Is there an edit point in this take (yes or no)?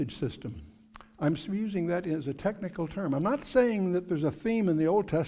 yes